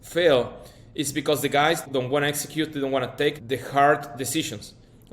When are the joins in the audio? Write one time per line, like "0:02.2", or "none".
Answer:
0:01.8
0:03.4